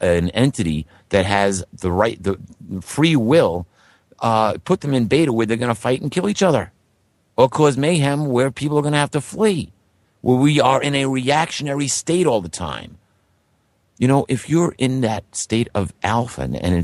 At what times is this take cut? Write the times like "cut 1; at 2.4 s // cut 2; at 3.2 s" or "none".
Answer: cut 1; at 5.1 s